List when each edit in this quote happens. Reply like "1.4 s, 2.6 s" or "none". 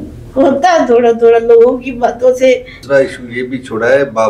2.7 s